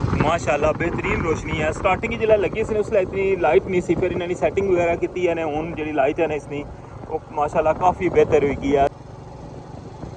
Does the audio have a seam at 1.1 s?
no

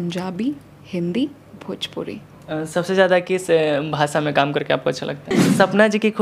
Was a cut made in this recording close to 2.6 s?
no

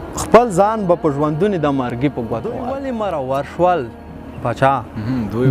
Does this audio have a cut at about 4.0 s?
no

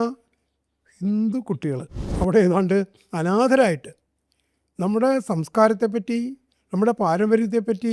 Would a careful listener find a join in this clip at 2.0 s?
yes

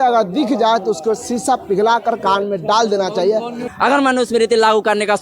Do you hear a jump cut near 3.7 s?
yes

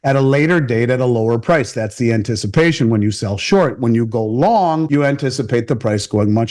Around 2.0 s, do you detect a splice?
no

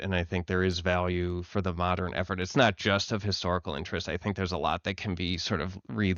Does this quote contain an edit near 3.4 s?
no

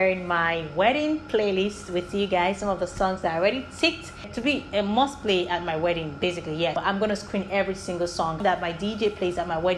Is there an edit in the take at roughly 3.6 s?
no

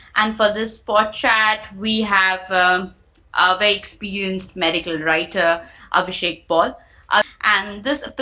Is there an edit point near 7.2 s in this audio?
yes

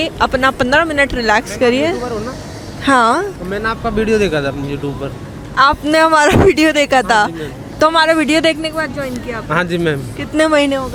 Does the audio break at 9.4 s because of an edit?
no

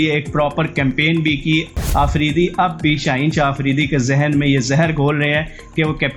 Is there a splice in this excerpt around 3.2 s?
no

